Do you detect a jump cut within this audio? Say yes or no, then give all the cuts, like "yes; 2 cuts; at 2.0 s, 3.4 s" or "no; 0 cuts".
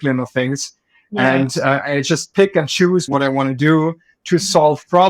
no; 0 cuts